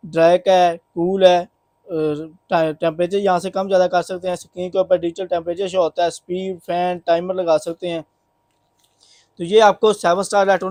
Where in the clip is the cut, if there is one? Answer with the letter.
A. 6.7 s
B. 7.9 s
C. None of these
C